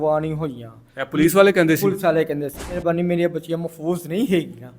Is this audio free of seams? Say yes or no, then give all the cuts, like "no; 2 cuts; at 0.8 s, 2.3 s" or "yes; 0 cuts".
no; 1 cut; at 2.8 s